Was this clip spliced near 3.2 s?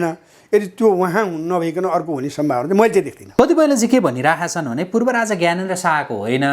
yes; 1 cut; at 3.2 s

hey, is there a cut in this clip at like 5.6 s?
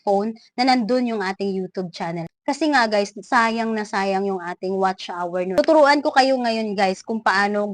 yes; 1 cut; at 5.6 s

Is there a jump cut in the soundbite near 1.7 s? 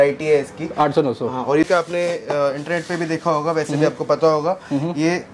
yes; 1 cut; at 1.7 s

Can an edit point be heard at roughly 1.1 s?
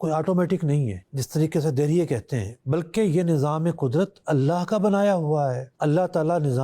yes; 2 cuts; at 1.1 s, 5.7 s

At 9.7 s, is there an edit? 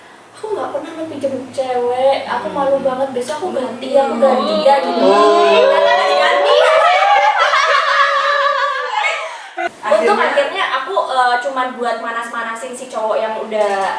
yes; 1 cut; at 9.7 s

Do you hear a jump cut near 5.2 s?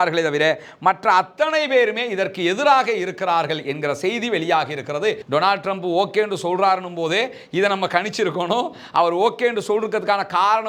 yes; 1 cut; at 5.2 s

